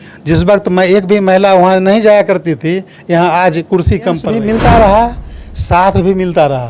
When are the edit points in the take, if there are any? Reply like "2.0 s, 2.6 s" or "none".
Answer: 4.3 s